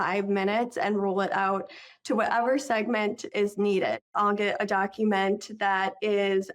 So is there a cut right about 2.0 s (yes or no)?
no